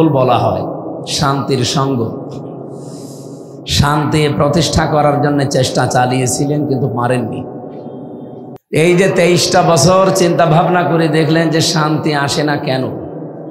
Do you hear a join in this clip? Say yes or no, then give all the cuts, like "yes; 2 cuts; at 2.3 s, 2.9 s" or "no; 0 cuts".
yes; 1 cut; at 8.6 s